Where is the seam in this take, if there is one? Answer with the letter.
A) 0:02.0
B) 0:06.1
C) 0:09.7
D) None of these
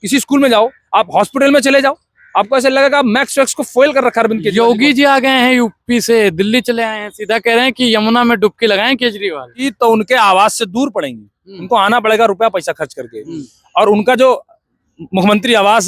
C